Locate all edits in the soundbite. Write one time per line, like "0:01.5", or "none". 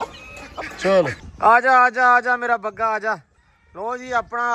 0:01.2